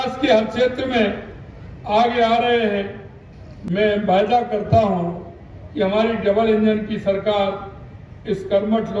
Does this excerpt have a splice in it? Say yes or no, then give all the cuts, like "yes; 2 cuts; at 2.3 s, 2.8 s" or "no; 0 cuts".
no; 0 cuts